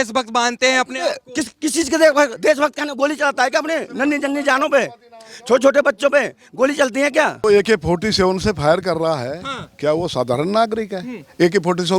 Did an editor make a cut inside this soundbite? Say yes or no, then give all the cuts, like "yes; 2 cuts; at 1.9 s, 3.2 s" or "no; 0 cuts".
yes; 1 cut; at 7.4 s